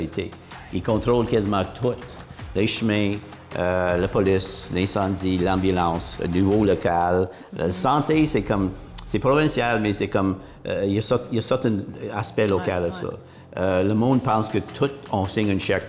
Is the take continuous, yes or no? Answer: yes